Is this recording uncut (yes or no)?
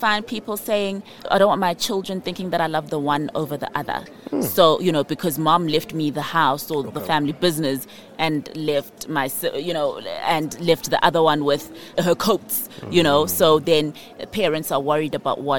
no